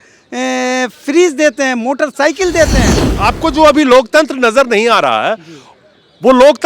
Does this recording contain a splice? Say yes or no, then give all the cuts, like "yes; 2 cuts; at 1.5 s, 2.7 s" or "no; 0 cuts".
yes; 1 cut; at 3.0 s